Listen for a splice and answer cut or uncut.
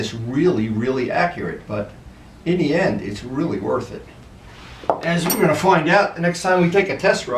uncut